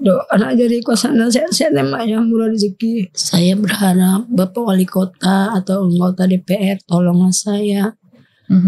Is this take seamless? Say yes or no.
no